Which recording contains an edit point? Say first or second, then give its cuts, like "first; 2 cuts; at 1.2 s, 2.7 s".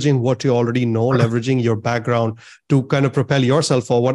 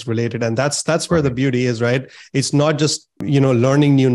second; 1 cut; at 3.2 s